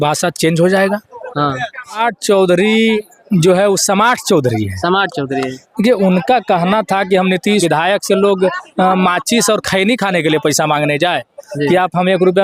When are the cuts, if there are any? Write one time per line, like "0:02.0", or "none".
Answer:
0:02.0
0:07.6